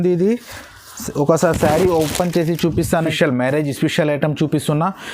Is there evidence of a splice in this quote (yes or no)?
yes